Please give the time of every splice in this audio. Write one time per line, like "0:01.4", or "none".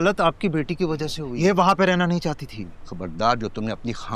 0:01.2